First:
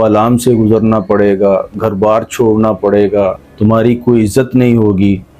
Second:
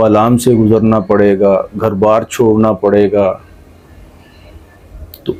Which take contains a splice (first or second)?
first